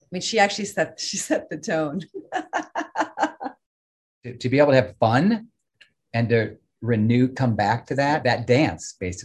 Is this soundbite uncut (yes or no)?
no